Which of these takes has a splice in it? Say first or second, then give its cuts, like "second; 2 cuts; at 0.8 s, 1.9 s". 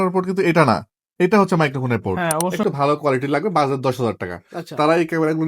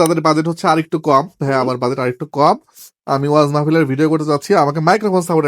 first; 1 cut; at 2.5 s